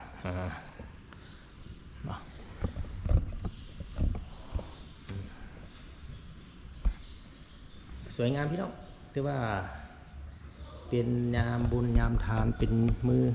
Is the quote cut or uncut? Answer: uncut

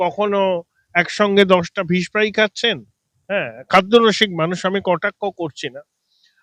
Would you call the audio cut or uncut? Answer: uncut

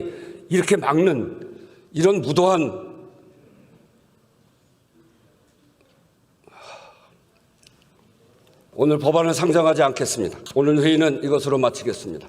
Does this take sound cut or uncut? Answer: cut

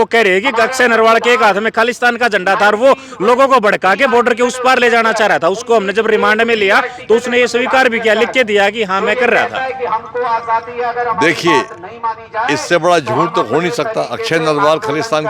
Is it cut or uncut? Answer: uncut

